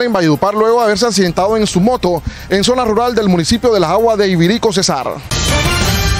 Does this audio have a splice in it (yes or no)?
yes